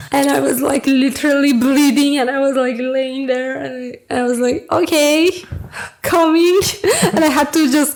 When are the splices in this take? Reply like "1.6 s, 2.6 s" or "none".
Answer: none